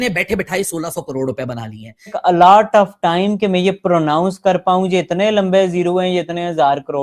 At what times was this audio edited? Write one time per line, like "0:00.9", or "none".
0:02.2